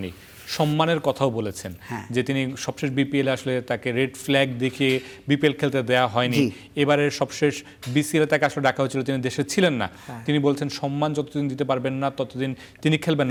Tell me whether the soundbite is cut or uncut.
uncut